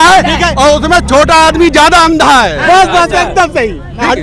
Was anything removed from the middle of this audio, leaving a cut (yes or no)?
no